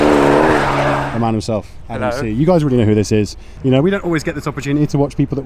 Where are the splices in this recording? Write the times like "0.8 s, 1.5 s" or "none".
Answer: 1.1 s, 3.5 s